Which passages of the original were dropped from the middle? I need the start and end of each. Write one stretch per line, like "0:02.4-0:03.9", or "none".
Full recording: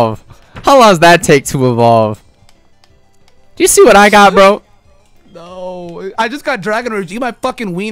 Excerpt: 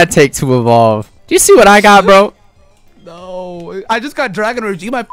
0:02.2-0:03.4